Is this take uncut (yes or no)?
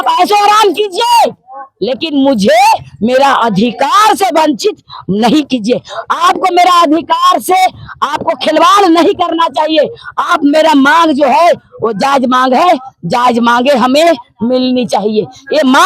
yes